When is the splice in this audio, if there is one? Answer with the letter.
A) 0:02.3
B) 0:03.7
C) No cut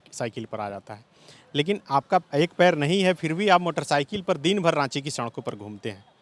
A